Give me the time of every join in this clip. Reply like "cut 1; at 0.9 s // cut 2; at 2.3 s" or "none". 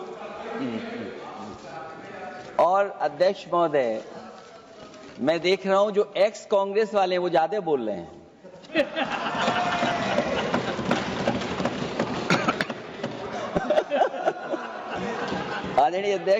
none